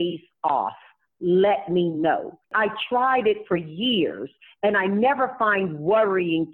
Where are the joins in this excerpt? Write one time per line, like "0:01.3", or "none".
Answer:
0:02.5